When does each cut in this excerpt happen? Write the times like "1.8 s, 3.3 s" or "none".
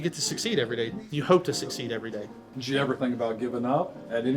1.0 s